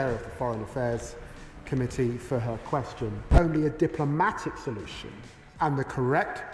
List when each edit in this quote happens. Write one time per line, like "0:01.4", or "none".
0:03.2